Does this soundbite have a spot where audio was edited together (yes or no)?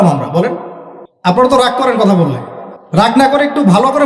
yes